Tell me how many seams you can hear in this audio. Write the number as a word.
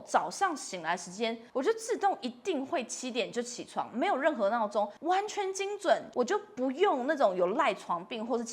three